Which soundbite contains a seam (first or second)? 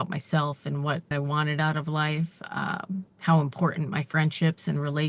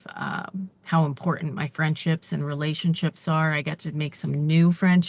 first